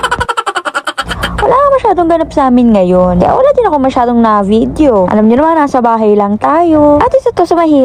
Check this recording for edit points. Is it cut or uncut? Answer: uncut